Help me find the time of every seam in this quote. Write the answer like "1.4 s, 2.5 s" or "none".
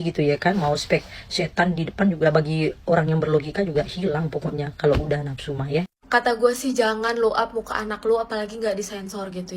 6.0 s